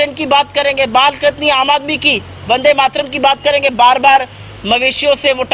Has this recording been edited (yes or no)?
no